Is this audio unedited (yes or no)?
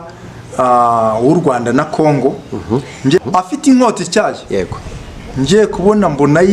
no